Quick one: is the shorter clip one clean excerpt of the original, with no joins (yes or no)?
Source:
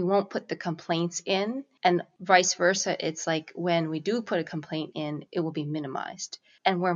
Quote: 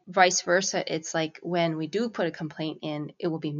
yes